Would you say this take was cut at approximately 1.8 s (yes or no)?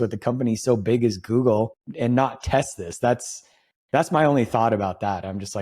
yes